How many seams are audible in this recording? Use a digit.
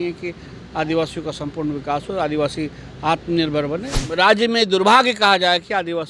1